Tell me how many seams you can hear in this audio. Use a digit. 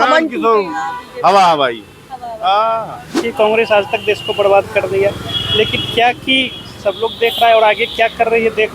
1